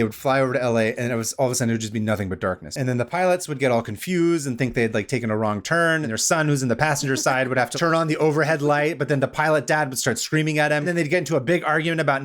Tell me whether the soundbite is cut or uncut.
cut